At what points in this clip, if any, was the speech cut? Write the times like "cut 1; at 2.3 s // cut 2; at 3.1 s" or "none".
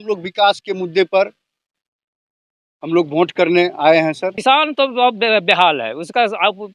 cut 1; at 4.4 s